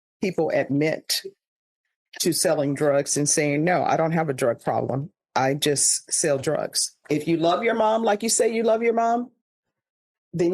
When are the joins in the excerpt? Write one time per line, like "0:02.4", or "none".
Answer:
0:07.0